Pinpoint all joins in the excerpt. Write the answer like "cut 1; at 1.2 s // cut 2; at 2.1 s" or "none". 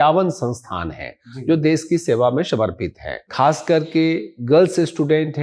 cut 1; at 3.2 s